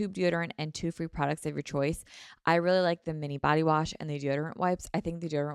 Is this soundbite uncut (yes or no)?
yes